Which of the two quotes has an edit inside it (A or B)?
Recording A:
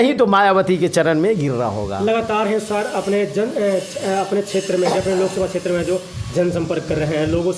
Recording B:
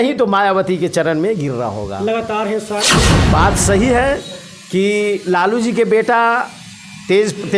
B